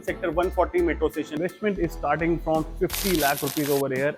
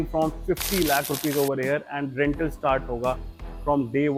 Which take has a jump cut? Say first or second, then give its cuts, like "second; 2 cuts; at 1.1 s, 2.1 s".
first; 1 cut; at 1.4 s